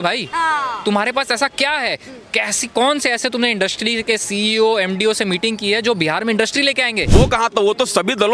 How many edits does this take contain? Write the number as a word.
one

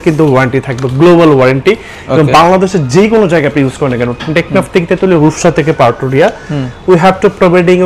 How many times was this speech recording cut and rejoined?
zero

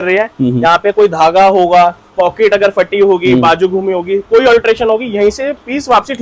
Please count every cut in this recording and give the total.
zero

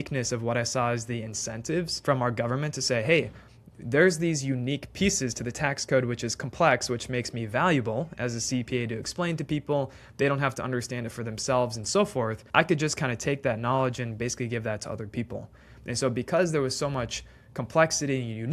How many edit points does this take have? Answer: one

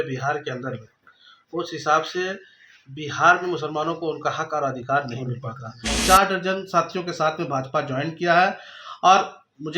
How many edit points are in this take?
one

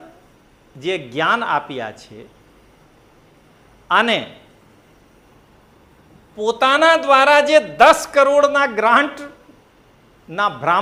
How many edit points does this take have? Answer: zero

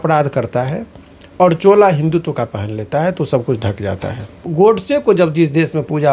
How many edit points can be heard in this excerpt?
one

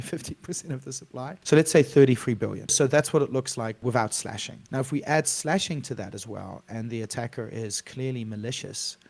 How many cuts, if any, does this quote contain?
four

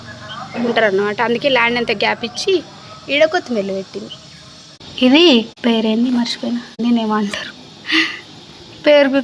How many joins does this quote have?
zero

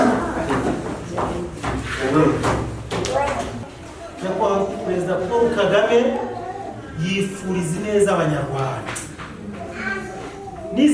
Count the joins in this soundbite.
one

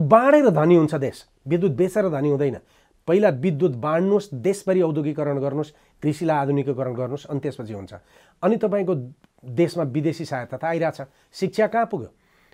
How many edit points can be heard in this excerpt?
zero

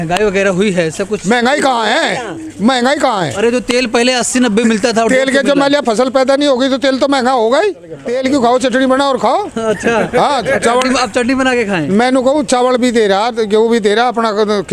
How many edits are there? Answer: one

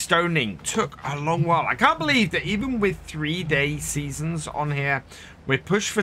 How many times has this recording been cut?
zero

